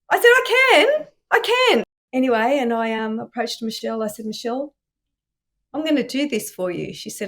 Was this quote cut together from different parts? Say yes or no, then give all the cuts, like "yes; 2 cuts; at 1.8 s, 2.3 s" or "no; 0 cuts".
yes; 1 cut; at 1.9 s